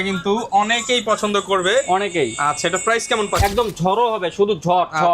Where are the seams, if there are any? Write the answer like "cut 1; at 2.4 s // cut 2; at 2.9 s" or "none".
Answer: cut 1; at 3.4 s